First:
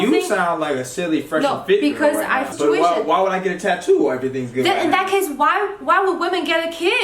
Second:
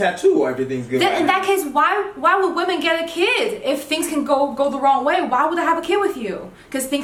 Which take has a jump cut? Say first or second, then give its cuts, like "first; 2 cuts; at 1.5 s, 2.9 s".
first; 1 cut; at 2.5 s